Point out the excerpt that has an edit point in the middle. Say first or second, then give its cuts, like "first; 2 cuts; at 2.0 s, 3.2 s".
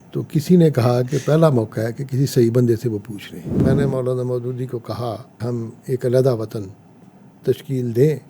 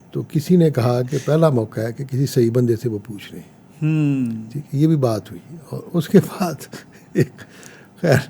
first; 2 cuts; at 3.6 s, 5.3 s